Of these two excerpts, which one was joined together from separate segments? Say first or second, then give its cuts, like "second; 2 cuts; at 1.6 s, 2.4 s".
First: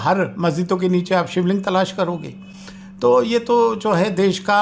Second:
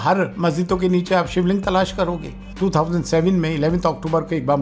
second; 1 cut; at 2.4 s